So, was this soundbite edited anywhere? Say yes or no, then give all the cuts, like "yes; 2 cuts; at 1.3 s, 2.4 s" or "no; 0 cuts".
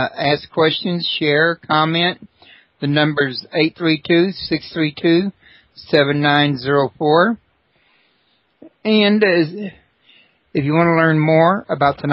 yes; 1 cut; at 1.8 s